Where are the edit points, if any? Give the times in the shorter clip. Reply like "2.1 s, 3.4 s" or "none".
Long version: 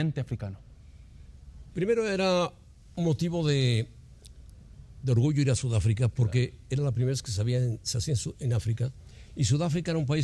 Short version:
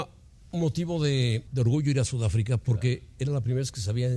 1.4 s